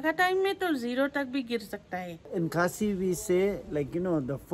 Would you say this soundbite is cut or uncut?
cut